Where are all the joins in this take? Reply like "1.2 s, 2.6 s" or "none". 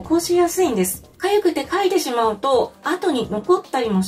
1.0 s, 2.8 s